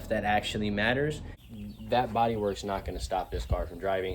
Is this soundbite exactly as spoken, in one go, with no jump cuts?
no; 1 cut; at 1.3 s

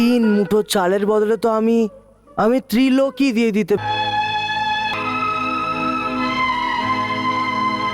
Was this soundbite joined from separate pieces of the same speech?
yes; 2 cuts; at 3.8 s, 4.9 s

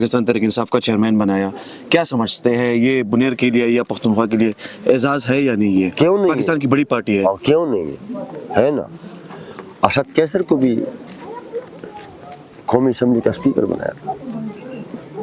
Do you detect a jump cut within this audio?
no; 0 cuts

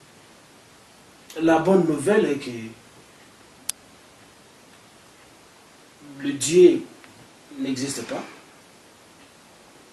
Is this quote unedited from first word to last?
yes; 0 cuts

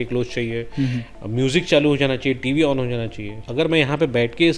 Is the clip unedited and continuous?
no; 1 cut; at 3.4 s

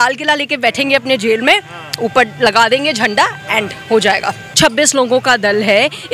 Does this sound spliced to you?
yes; 1 cut; at 4.4 s

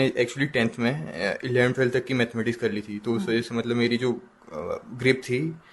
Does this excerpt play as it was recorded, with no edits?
yes; 0 cuts

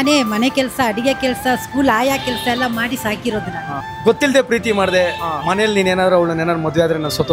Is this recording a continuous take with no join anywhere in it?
no; 1 cut; at 3.8 s

